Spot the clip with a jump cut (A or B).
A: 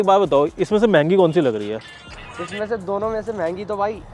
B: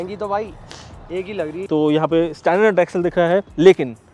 B